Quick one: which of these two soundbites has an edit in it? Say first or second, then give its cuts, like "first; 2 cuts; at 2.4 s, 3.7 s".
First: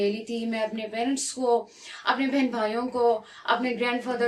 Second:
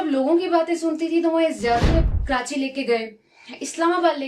second; 1 cut; at 1.9 s